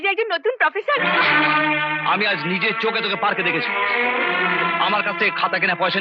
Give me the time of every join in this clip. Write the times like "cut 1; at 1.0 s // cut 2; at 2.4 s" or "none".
none